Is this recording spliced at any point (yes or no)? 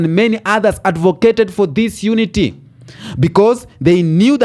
no